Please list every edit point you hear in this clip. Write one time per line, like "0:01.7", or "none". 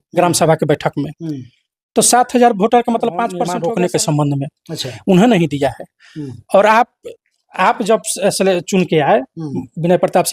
0:03.4